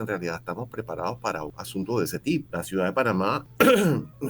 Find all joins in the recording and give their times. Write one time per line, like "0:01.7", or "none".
0:01.6
0:02.5
0:03.5